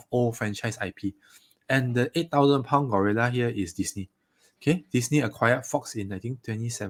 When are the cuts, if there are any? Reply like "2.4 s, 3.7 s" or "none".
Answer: none